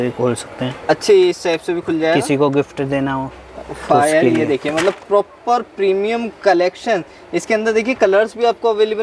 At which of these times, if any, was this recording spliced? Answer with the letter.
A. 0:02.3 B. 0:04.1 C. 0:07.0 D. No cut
D